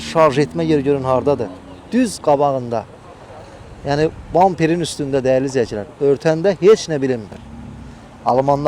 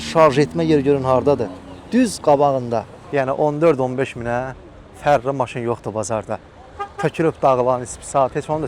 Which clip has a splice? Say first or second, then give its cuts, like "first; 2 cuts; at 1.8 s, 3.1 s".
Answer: second; 1 cut; at 3.0 s